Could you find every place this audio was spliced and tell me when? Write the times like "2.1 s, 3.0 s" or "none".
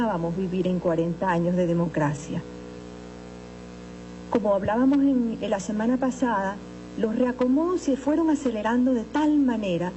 5.6 s